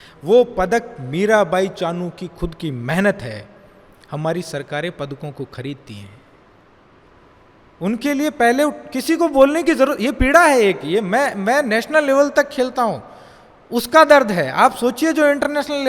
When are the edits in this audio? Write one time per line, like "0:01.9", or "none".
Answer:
0:07.1